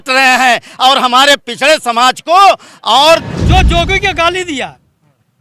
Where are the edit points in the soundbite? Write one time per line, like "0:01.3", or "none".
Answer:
0:03.3